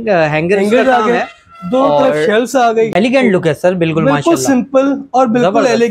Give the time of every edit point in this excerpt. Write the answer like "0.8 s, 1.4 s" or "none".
2.9 s